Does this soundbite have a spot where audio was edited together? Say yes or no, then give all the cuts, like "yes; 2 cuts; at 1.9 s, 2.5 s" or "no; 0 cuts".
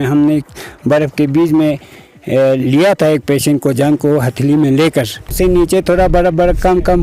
yes; 1 cut; at 5.3 s